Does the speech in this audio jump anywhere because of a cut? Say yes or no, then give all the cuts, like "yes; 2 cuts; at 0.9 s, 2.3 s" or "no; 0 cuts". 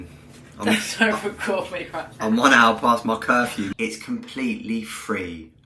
yes; 1 cut; at 3.6 s